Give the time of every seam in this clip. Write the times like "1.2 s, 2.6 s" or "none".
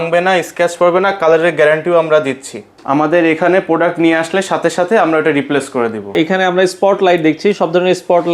2.7 s, 6.1 s